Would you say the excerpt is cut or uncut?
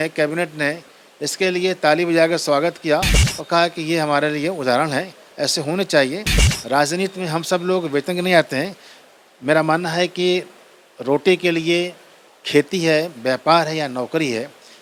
uncut